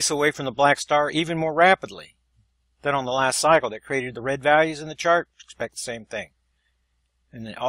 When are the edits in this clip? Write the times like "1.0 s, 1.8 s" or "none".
5.1 s